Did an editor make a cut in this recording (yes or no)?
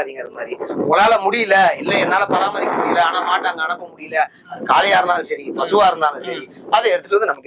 no